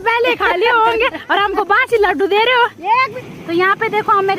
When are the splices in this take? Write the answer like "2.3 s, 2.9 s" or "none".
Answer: 3.2 s